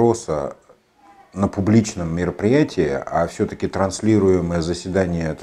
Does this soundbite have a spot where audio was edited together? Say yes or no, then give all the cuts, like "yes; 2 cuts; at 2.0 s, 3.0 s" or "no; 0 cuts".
no; 0 cuts